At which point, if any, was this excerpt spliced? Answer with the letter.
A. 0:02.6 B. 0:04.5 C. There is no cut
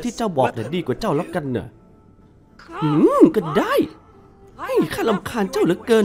C